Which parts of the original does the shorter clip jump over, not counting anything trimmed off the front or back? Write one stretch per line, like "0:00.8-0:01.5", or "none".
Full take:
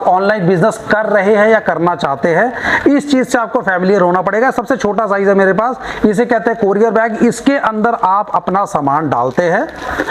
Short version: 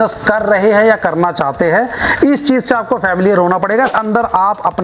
0:04.5-0:07.6